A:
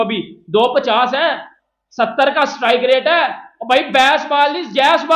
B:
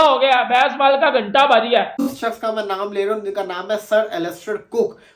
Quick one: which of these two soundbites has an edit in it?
B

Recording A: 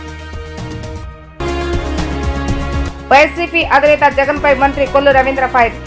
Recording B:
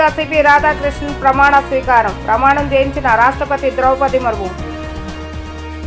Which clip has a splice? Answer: A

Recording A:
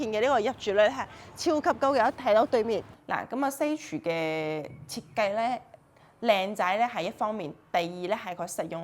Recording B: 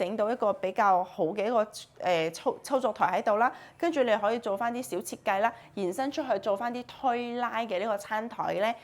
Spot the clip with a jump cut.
A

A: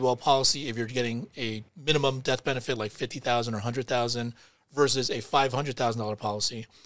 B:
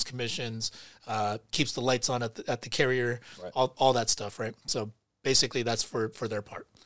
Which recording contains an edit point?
A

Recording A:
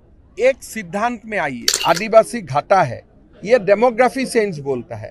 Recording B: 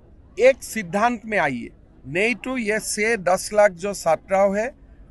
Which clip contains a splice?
A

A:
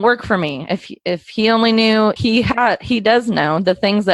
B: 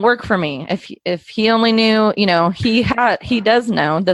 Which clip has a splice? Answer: A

